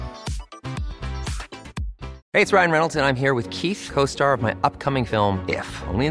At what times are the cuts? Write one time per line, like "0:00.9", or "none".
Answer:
0:02.2